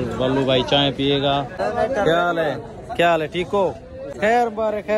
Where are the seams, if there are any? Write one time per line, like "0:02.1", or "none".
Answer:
0:01.6
0:04.1